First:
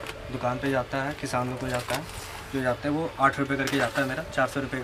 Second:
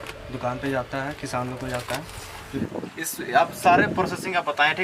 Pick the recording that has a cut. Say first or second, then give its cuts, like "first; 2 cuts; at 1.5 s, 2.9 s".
second; 1 cut; at 2.6 s